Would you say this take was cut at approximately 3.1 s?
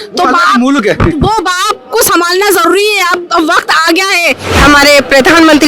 no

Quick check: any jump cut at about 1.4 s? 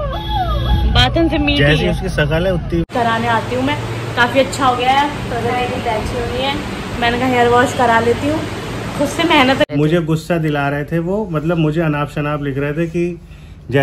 no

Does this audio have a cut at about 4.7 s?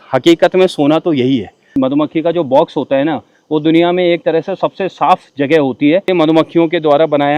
no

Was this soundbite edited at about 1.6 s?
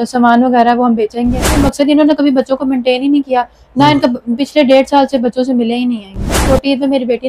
yes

